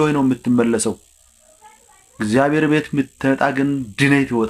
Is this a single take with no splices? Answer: yes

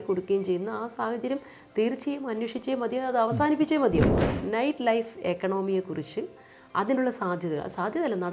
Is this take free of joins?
no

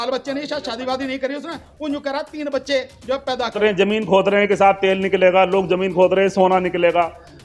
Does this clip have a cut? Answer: yes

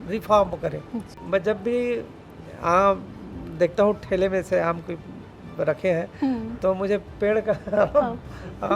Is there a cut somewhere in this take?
yes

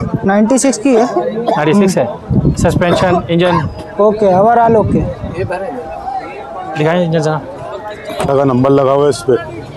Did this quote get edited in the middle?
yes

